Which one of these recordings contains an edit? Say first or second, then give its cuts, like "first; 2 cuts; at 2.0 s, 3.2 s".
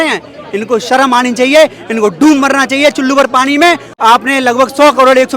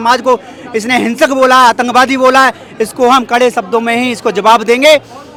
first; 1 cut; at 3.9 s